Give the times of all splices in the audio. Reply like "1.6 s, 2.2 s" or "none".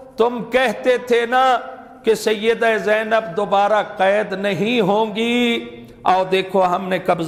none